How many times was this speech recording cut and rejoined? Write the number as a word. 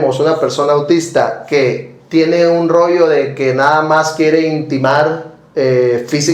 zero